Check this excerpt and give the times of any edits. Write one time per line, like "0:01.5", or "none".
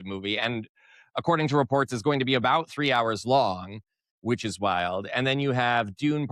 none